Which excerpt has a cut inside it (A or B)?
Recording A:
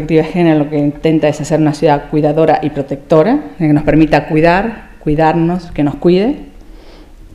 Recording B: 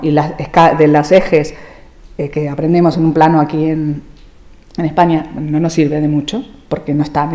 A